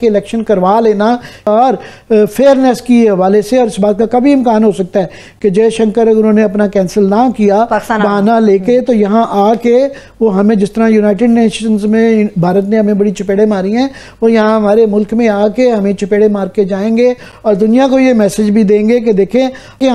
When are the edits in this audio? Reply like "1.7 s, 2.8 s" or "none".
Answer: 1.4 s